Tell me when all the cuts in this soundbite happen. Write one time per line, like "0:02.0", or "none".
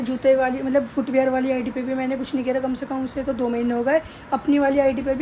none